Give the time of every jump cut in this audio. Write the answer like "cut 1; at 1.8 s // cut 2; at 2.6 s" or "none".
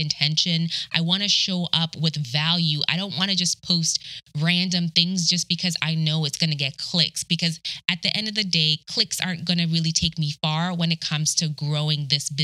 none